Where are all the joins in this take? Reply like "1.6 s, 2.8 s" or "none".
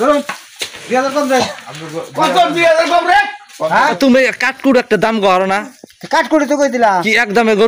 4.0 s